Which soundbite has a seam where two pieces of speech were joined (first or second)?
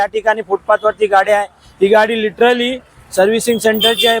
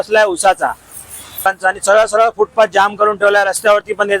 second